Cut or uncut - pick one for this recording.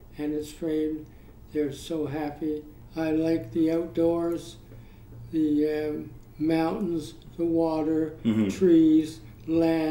cut